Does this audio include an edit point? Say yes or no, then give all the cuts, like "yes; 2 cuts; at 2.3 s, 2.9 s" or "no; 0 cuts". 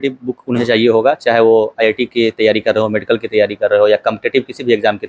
no; 0 cuts